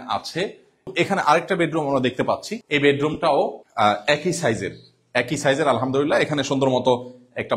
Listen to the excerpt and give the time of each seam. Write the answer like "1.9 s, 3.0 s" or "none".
0.9 s, 2.5 s, 3.6 s